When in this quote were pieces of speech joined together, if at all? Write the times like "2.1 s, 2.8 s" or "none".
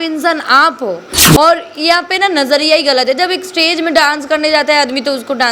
1.1 s